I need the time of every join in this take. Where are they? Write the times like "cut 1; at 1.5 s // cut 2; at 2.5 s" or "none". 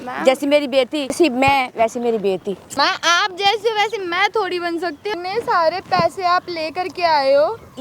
cut 1; at 1.2 s // cut 2; at 2.6 s // cut 3; at 5.1 s